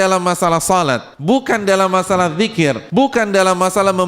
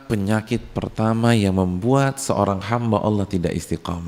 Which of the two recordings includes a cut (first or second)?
first